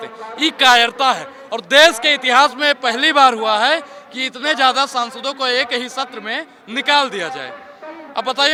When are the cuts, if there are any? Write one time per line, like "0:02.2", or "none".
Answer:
none